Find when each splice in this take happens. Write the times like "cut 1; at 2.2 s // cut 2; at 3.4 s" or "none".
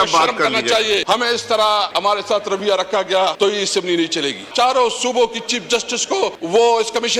cut 1; at 1.0 s // cut 2; at 1.9 s // cut 3; at 3.3 s // cut 4; at 4.5 s // cut 5; at 6.4 s